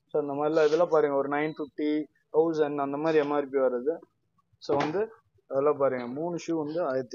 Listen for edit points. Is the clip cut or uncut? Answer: uncut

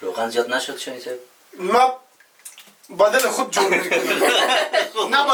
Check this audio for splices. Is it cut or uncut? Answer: uncut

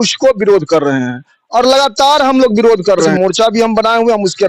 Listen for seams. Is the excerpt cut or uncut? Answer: cut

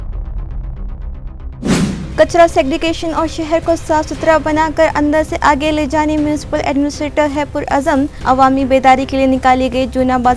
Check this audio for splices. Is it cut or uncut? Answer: uncut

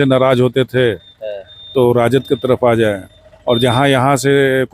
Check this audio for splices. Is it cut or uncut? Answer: uncut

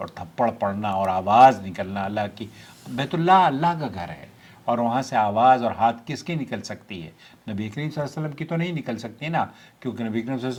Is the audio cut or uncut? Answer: uncut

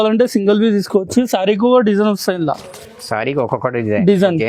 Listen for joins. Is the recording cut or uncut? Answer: uncut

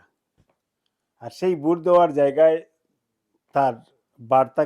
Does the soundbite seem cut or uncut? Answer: uncut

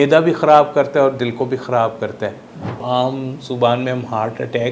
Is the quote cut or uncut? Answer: cut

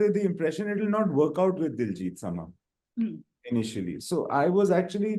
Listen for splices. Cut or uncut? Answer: uncut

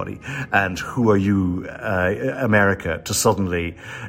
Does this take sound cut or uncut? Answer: uncut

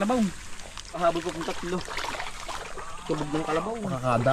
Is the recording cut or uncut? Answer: cut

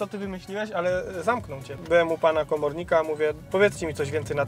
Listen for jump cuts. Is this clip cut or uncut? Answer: cut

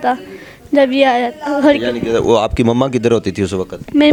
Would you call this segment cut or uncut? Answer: uncut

